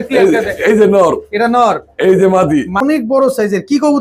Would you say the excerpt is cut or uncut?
cut